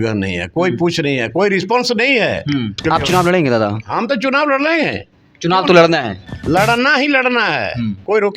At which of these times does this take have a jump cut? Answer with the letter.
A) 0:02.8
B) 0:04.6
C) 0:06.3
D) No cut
A